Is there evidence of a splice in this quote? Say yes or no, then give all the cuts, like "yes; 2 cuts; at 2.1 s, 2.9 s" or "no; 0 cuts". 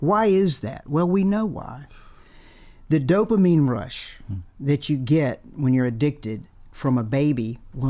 no; 0 cuts